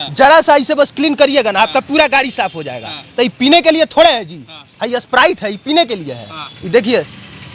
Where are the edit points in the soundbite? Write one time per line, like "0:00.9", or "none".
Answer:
none